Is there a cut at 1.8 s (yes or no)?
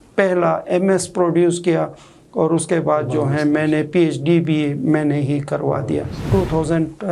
no